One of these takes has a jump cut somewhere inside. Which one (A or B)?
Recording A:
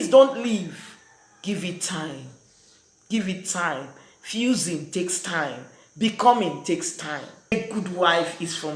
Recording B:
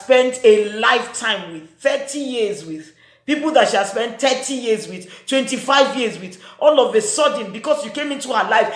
A